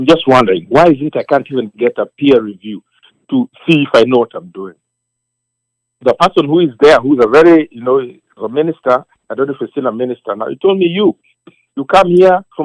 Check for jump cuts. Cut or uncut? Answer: uncut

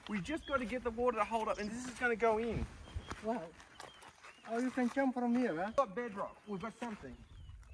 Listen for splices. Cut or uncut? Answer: cut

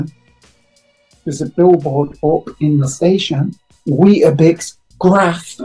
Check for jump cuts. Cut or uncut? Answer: uncut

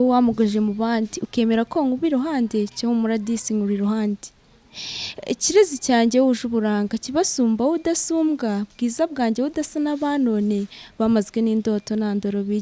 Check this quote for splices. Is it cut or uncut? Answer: uncut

